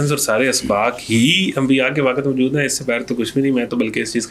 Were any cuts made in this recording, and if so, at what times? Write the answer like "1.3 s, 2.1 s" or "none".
none